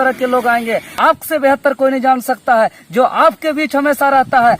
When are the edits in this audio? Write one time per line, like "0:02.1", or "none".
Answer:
0:01.0